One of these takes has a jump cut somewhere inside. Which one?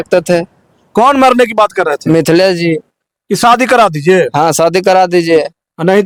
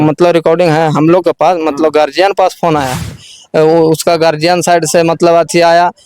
second; 1 cut; at 3.3 s

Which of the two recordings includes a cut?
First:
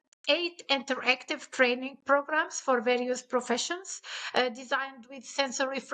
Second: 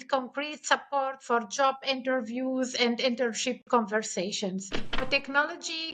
second; 1 cut; at 5.0 s

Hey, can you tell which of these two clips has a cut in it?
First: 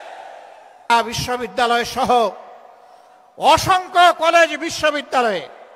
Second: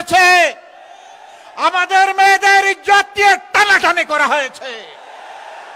first; 1 cut; at 0.9 s

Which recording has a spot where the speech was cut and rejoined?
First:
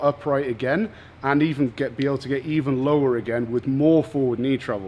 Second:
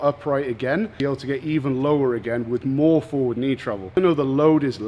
second; 2 cuts; at 0.9 s, 3.9 s

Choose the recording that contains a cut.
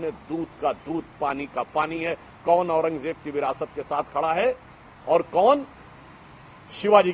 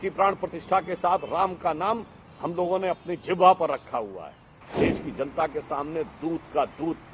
second; 1 cut; at 4.6 s

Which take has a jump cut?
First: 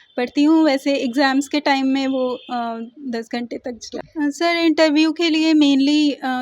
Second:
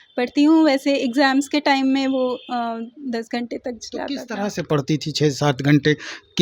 first; 1 cut; at 3.9 s

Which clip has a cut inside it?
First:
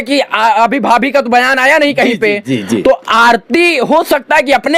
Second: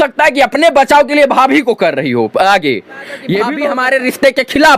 second; 1 cut; at 3.5 s

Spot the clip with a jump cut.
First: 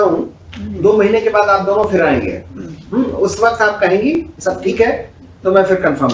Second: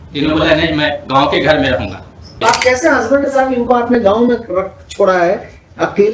second; 1 cut; at 2.4 s

